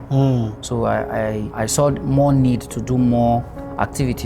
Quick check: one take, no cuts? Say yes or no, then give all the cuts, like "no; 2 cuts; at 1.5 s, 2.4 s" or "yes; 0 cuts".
no; 1 cut; at 1.5 s